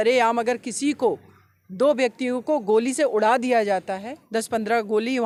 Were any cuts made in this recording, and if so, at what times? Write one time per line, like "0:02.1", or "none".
none